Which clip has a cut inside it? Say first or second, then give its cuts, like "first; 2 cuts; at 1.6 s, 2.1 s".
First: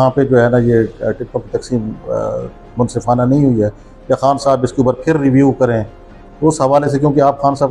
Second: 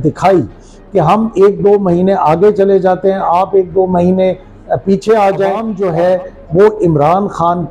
second; 1 cut; at 5.7 s